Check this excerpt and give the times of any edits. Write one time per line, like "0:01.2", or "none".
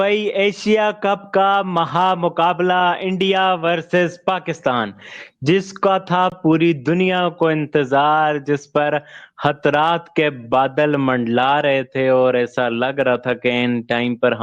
none